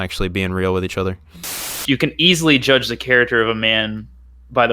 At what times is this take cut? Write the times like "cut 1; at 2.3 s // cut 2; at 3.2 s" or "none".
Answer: cut 1; at 1.8 s